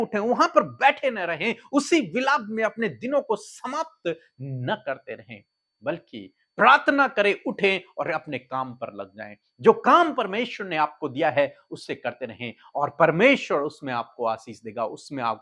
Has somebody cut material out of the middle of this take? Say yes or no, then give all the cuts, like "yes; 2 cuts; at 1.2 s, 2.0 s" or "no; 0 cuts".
no; 0 cuts